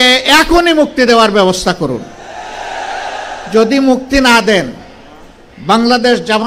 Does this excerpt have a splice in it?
no; 0 cuts

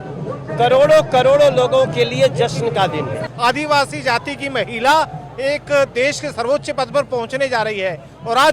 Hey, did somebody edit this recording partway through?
yes; 1 cut; at 3.3 s

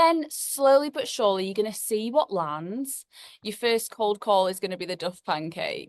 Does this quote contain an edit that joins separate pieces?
yes; 1 cut; at 3.3 s

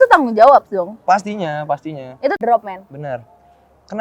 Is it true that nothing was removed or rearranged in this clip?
no; 1 cut; at 2.4 s

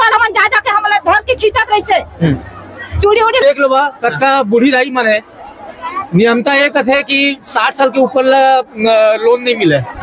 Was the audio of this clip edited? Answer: yes; 1 cut; at 3.4 s

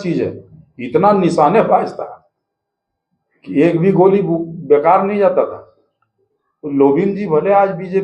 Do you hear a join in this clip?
yes; 1 cut; at 6.1 s

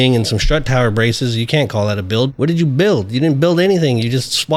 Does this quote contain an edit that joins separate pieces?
yes; 1 cut; at 2.3 s

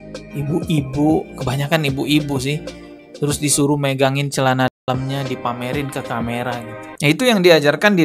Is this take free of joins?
no; 1 cut; at 7.0 s

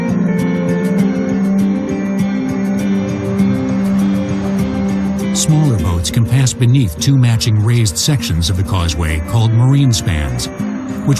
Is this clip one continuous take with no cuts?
yes; 0 cuts

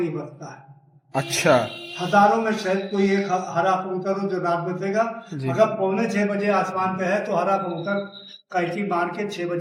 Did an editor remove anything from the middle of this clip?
no; 0 cuts

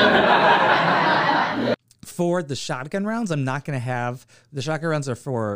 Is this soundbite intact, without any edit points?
no; 1 cut; at 1.7 s

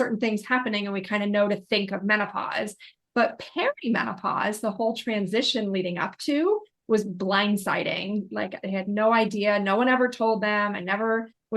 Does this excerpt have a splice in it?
yes; 1 cut; at 8.3 s

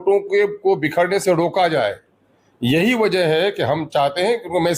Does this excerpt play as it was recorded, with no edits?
yes; 0 cuts

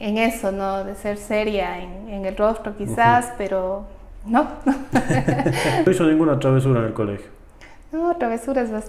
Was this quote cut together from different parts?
yes; 1 cut; at 5.9 s

